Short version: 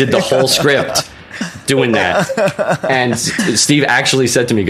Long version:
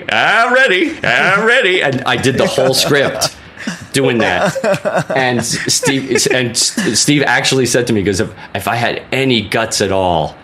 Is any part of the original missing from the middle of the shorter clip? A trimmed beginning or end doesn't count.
yes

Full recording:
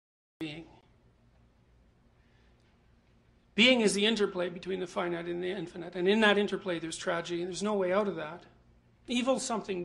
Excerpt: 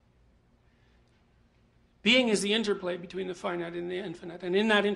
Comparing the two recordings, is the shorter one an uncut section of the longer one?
yes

